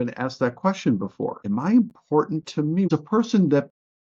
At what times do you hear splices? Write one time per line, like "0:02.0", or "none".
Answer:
0:01.4
0:02.9